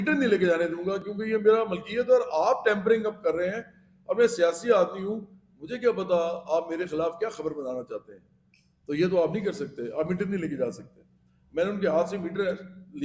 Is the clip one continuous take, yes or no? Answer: yes